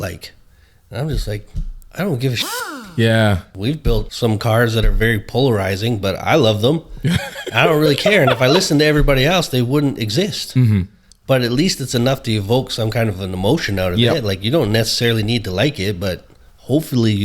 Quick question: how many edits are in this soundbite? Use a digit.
1